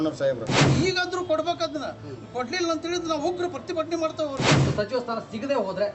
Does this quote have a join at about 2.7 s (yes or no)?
no